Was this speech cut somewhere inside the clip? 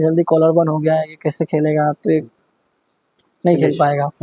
no; 0 cuts

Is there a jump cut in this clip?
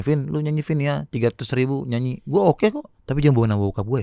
yes; 1 cut; at 2.9 s

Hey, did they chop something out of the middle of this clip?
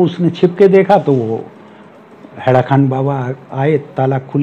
no; 0 cuts

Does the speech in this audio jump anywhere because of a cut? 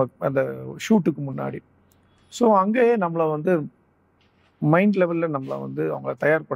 no; 0 cuts

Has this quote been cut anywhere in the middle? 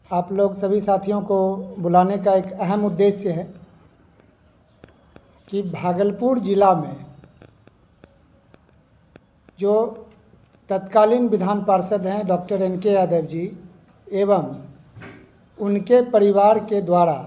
no; 0 cuts

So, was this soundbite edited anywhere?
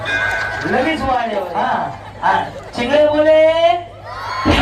yes; 1 cut; at 1.5 s

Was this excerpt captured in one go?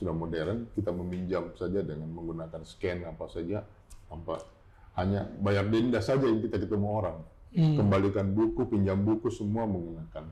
yes; 0 cuts

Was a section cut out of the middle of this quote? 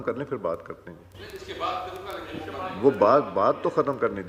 no; 0 cuts

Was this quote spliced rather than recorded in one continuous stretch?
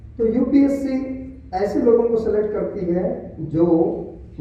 no; 0 cuts

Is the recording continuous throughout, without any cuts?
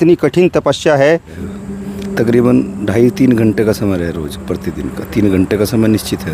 no; 1 cut; at 1.4 s

